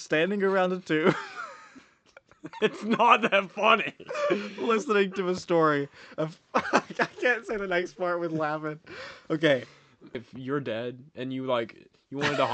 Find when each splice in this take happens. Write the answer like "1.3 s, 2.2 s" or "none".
10.1 s